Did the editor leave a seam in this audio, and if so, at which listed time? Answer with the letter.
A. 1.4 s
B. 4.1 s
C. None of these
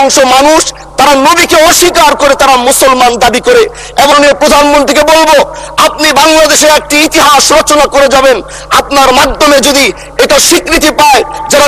B